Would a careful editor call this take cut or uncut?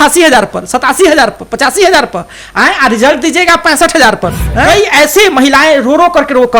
cut